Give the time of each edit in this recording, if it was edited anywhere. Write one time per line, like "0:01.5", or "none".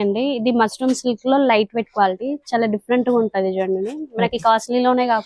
none